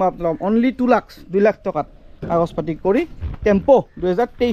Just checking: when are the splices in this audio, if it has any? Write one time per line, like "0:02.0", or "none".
none